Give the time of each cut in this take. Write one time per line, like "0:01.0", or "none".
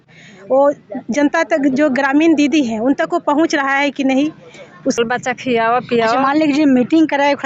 0:05.0